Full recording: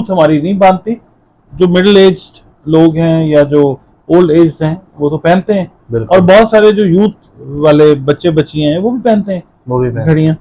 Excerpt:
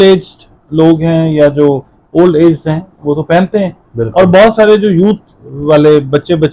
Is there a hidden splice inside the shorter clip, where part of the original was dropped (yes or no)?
no